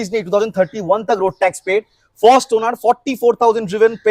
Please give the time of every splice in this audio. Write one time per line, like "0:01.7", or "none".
none